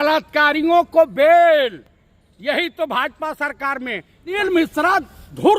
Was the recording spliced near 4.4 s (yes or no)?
yes